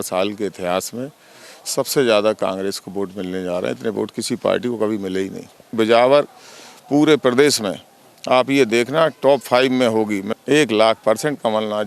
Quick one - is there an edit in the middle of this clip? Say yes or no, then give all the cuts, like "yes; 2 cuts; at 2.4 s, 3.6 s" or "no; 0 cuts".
yes; 2 cuts; at 5.7 s, 10.2 s